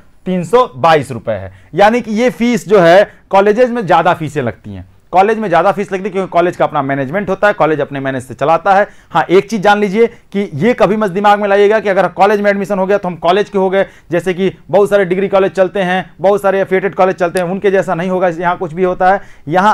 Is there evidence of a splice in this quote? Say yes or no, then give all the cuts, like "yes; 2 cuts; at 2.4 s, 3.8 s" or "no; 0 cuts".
no; 0 cuts